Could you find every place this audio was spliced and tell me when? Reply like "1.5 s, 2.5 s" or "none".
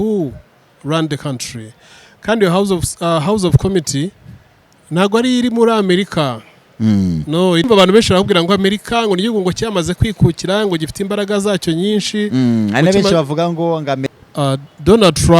7.6 s, 14.0 s